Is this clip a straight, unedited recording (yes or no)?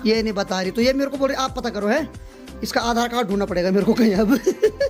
yes